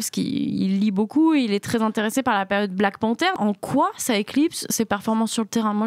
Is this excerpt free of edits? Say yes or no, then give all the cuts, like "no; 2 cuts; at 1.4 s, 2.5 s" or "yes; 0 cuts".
no; 1 cut; at 3.3 s